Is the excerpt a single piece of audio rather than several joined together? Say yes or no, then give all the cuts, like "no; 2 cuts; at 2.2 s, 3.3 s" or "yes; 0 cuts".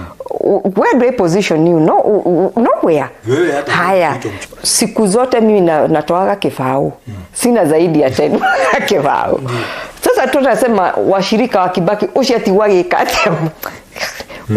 no; 1 cut; at 4.4 s